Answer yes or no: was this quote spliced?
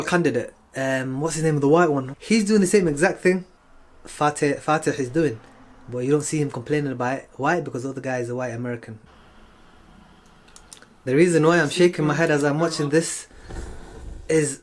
yes